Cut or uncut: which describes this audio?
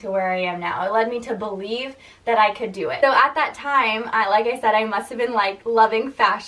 uncut